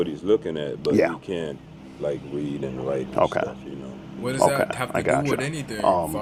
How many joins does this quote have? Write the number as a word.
zero